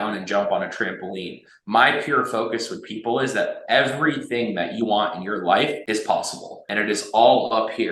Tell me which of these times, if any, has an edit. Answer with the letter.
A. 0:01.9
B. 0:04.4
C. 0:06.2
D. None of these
C